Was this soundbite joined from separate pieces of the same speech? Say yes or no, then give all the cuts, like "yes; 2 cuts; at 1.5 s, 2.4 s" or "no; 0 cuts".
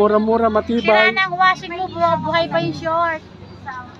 no; 0 cuts